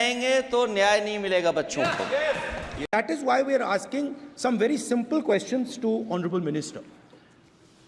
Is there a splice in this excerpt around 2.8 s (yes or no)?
no